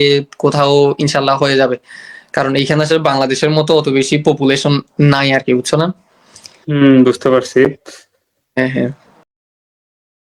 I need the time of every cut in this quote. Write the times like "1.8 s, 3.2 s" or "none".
none